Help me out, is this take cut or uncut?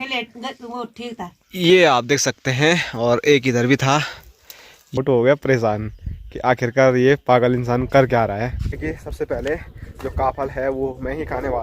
cut